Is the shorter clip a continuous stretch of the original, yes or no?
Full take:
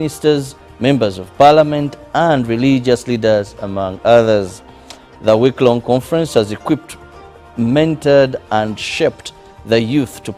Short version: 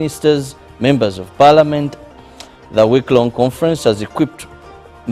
no